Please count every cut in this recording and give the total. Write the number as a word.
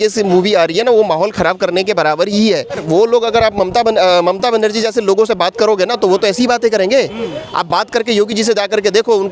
one